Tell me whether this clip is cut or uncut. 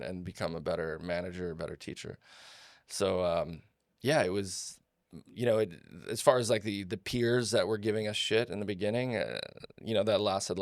uncut